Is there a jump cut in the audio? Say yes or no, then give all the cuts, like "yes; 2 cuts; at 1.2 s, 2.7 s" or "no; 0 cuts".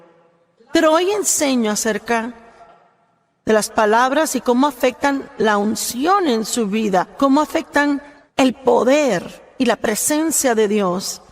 yes; 1 cut; at 8.2 s